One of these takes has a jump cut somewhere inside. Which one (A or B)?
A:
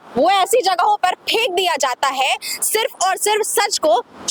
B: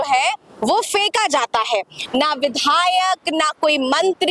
B